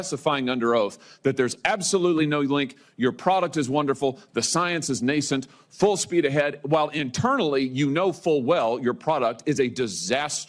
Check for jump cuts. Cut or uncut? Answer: uncut